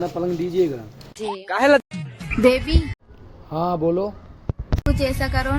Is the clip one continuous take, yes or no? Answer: no